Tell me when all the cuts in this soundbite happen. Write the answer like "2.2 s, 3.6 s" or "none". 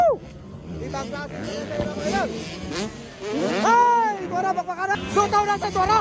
4.9 s